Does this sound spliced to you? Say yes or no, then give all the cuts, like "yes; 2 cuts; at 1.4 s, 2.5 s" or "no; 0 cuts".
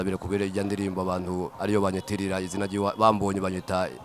no; 0 cuts